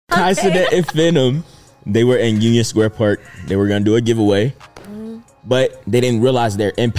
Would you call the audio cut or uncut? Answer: uncut